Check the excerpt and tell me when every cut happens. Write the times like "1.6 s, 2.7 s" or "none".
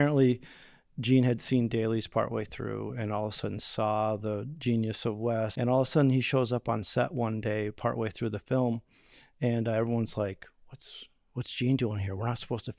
5.5 s